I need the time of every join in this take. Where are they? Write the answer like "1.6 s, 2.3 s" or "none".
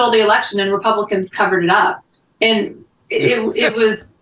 none